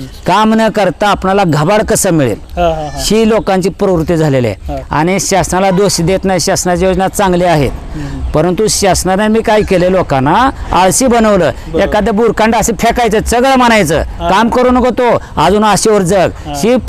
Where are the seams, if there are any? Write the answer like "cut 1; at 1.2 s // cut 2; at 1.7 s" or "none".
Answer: none